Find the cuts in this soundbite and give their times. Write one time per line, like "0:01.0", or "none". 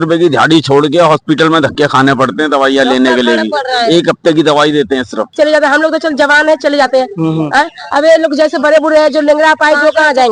0:05.3